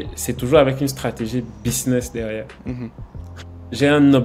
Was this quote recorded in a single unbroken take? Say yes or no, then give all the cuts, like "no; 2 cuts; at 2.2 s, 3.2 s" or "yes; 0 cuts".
yes; 0 cuts